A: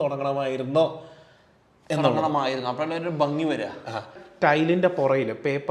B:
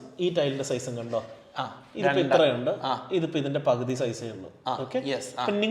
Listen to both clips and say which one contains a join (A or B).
A